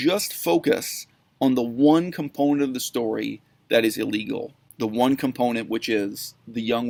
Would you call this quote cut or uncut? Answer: uncut